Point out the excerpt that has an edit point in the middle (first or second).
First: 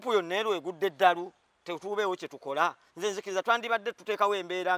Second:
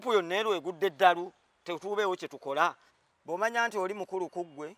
second